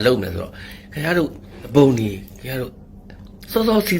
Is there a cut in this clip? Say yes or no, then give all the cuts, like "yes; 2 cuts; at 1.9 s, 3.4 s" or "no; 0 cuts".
yes; 1 cut; at 1.7 s